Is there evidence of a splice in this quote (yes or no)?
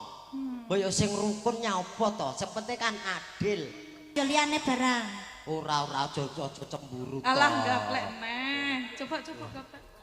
yes